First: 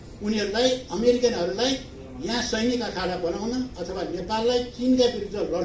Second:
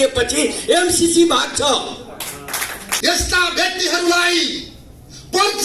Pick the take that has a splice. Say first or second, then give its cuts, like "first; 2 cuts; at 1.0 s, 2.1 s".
second; 1 cut; at 2.8 s